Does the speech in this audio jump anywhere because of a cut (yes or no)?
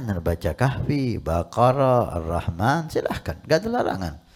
no